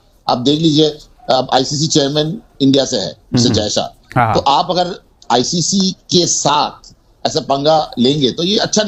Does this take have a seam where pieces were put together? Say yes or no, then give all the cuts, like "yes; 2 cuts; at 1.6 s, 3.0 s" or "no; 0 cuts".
no; 0 cuts